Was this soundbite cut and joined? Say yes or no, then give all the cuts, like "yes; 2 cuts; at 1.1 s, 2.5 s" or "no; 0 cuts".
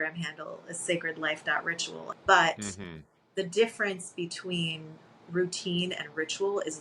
yes; 1 cut; at 2.1 s